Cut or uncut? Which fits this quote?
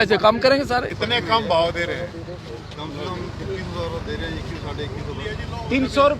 cut